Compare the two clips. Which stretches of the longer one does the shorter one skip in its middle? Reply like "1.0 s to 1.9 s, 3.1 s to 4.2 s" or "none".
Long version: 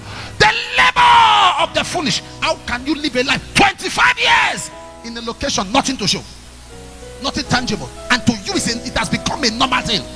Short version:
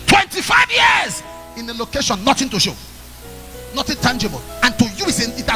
none